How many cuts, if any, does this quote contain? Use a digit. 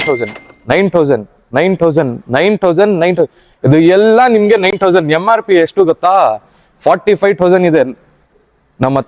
0